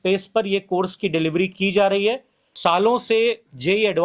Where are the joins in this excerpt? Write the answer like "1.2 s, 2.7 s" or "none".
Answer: 2.4 s

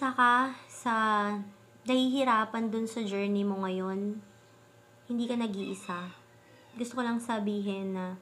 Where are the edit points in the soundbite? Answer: none

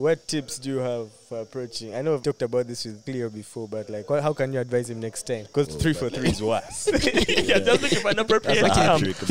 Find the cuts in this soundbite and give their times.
2.2 s, 3.0 s, 5.5 s

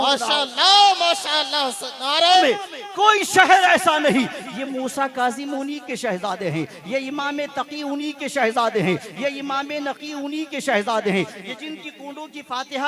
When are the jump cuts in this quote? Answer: 2.4 s

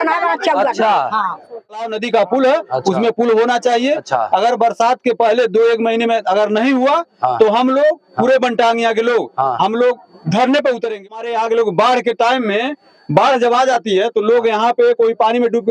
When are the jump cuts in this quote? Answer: 1.8 s, 11.1 s

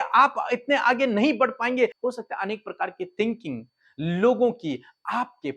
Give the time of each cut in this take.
2.0 s

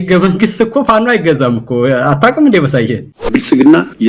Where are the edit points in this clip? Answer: 3.2 s

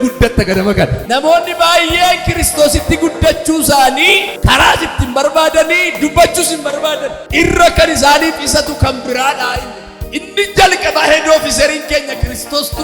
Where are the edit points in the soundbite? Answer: 1.0 s, 4.3 s, 7.2 s, 10.2 s

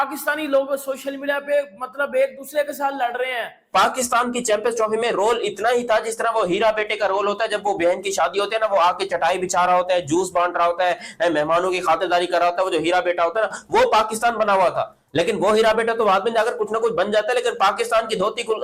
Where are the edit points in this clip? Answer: 3.6 s

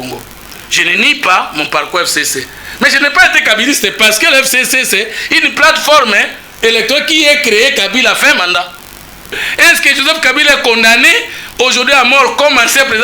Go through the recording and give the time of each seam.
9.3 s

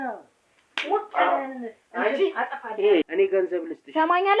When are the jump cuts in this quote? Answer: 3.0 s

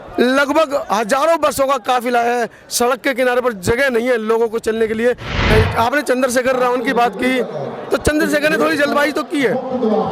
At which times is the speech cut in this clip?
5.4 s

